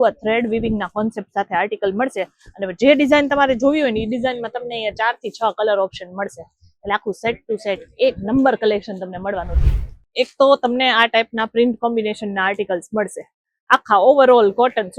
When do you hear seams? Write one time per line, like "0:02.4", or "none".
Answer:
0:09.5